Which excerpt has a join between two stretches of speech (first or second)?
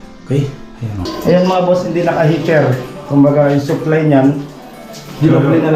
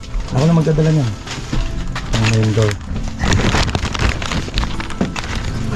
first